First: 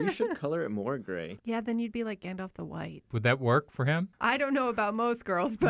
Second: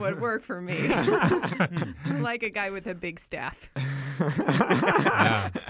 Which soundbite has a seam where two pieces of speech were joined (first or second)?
first